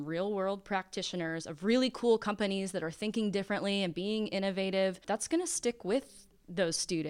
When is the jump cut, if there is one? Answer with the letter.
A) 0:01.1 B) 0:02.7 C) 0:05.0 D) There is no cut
C